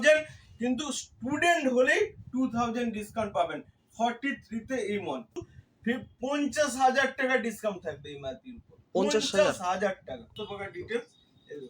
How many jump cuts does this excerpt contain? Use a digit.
2